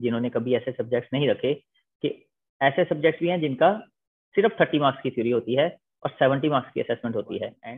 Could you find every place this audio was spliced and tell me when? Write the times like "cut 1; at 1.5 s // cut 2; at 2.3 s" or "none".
none